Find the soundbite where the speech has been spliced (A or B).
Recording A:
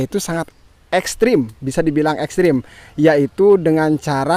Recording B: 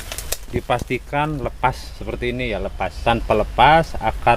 B